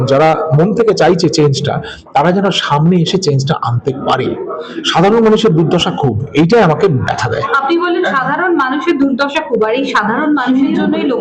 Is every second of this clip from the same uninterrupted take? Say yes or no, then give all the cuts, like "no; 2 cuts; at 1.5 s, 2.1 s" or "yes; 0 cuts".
yes; 0 cuts